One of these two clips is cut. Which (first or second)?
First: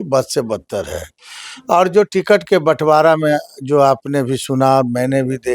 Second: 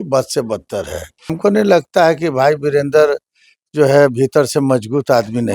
second